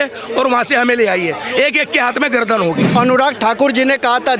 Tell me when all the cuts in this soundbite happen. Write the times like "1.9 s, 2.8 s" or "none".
2.9 s